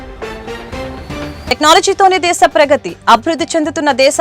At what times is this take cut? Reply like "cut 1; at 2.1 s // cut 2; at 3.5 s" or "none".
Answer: none